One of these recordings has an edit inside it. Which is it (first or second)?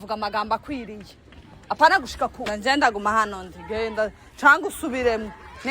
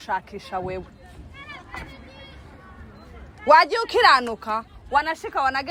first